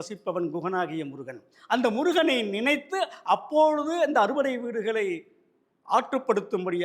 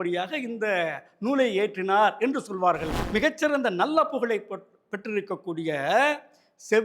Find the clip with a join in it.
second; 1 cut; at 2.9 s

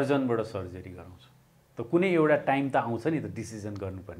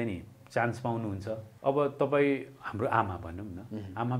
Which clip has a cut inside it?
second; 1 cut; at 1.5 s

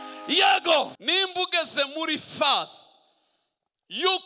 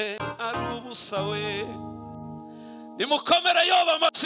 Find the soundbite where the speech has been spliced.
first; 1 cut; at 1.0 s

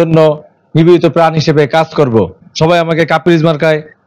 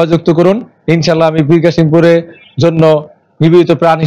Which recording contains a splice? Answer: first; 1 cut; at 2.4 s

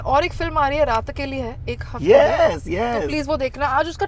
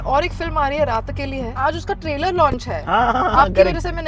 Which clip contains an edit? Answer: second; 1 cut; at 1.6 s

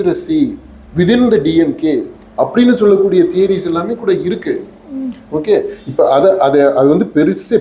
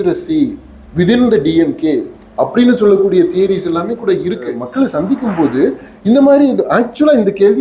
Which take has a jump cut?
second; 1 cut; at 4.6 s

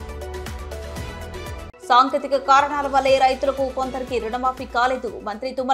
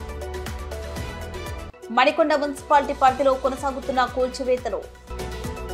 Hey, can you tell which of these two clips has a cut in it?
first; 1 cut; at 1.8 s

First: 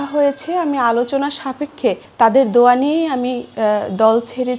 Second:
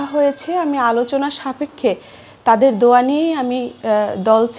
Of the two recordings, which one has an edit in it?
first; 1 cut; at 2.0 s

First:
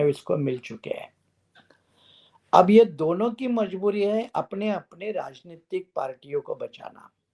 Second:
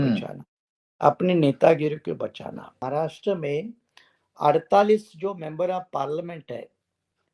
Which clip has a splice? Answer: second; 1 cut; at 2.8 s

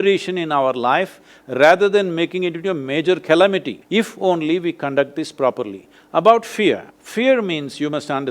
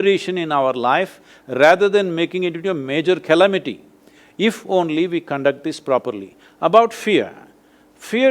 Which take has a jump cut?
first; 2 cuts; at 3.8 s, 7.0 s

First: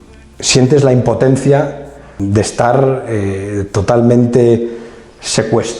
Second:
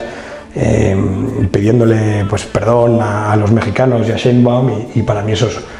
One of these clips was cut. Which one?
first; 1 cut; at 2.1 s

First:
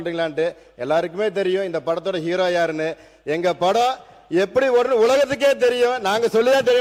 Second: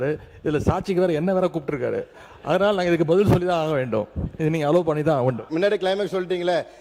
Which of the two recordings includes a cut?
second; 1 cut; at 5.5 s

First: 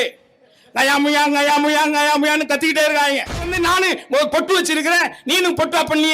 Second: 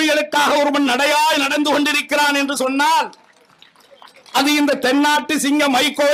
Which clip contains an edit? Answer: first; 1 cut; at 3.5 s

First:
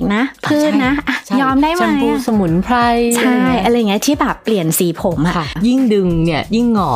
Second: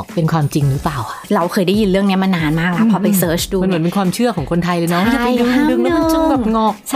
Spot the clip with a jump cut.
first; 1 cut; at 5.5 s

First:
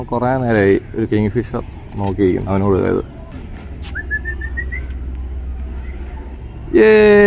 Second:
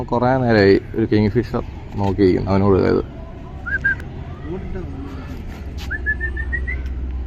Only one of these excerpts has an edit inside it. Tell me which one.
first; 1 cut; at 3.3 s

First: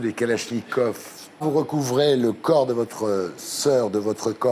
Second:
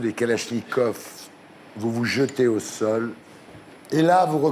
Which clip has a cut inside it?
first; 1 cut; at 1.4 s

